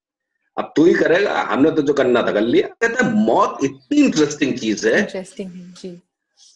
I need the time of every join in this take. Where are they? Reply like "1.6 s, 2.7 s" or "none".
2.8 s